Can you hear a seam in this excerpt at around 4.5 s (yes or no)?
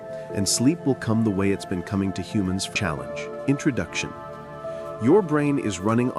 no